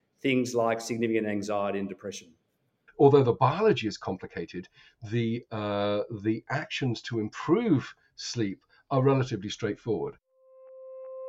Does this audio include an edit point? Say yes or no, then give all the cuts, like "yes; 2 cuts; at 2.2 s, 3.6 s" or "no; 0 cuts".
yes; 2 cuts; at 2.8 s, 10.2 s